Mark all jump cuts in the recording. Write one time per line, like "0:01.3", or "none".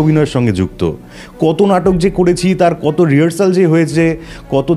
none